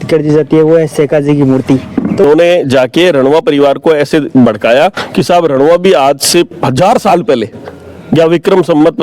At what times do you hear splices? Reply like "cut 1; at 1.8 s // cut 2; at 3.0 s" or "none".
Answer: cut 1; at 2.2 s